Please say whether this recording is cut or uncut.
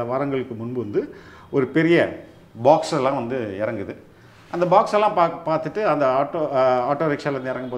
uncut